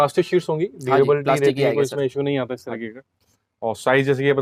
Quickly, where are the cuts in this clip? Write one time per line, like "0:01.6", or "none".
none